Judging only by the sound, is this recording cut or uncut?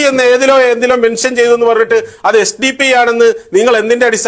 uncut